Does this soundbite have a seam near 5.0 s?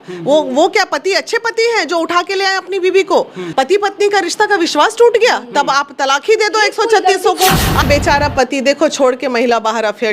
no; 2 cuts; at 3.4 s, 7.8 s

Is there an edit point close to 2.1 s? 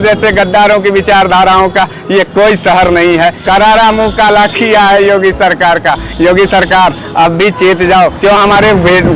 no; 2 cuts; at 3.4 s, 8.2 s

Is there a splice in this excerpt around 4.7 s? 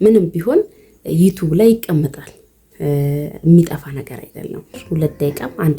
yes; 1 cut; at 4.7 s

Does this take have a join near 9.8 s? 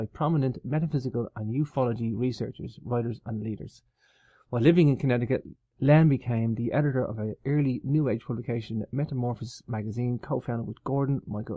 no; 1 cut; at 6.6 s

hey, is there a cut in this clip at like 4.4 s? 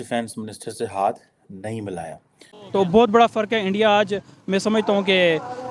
no; 1 cut; at 2.6 s

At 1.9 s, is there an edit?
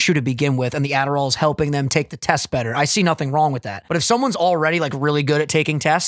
no; 1 cut; at 3.7 s

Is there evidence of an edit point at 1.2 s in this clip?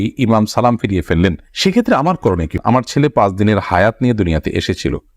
no; 1 cut; at 2.5 s

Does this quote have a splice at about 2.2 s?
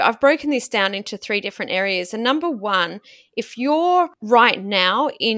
no; 1 cut; at 4.2 s

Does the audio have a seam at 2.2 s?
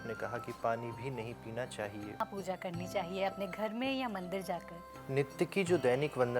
yes; 1 cut; at 2.2 s

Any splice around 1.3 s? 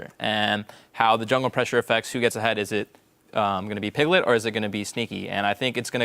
no; 1 cut; at 4.4 s

